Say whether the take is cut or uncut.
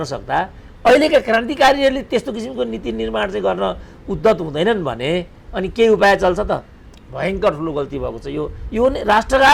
uncut